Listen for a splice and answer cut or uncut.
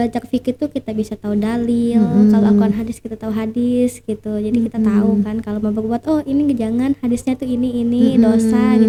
uncut